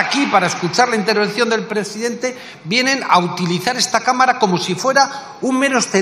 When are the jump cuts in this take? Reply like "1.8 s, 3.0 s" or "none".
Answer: none